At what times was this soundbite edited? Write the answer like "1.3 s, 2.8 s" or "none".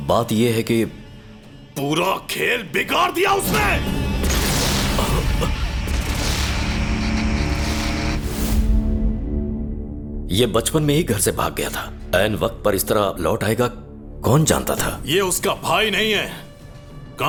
none